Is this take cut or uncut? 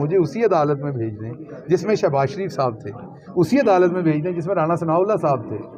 uncut